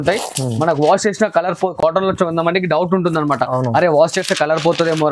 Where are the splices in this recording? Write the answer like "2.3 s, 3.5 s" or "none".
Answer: none